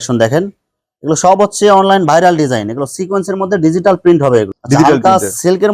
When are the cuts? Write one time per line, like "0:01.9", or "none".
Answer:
0:04.6